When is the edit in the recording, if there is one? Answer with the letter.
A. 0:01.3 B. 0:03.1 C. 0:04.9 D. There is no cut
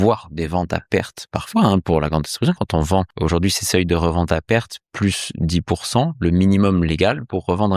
B